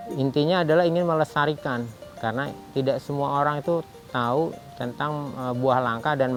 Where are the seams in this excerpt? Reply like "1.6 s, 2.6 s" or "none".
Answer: none